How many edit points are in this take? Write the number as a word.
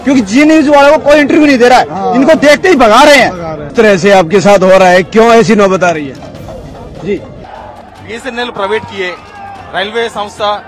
two